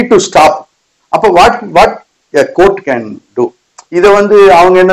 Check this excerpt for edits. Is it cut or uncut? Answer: uncut